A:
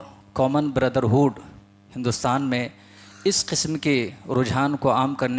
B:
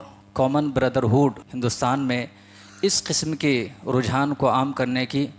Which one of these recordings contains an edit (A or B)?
B